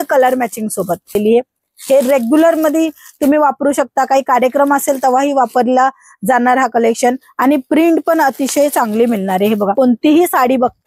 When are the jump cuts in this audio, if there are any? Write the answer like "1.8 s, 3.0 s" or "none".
1.1 s, 9.7 s